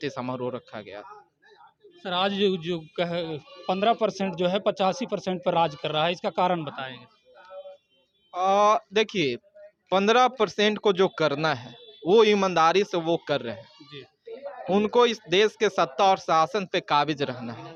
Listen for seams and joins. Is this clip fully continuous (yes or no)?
yes